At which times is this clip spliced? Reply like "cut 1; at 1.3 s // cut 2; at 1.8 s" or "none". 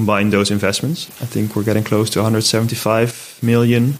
cut 1; at 1.0 s